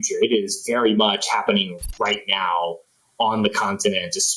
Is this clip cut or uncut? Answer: uncut